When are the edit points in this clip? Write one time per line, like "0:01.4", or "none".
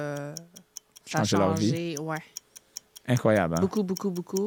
none